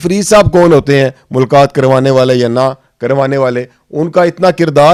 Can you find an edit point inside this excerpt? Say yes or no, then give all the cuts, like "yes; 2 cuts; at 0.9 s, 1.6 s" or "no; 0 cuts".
no; 0 cuts